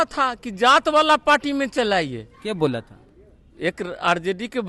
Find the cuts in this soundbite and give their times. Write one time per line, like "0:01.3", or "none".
none